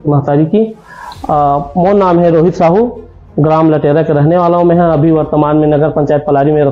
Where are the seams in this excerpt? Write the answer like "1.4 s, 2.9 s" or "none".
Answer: none